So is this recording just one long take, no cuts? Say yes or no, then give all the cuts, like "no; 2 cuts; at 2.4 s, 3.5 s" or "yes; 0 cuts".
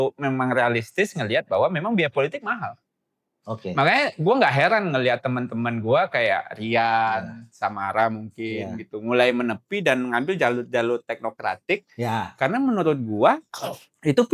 yes; 0 cuts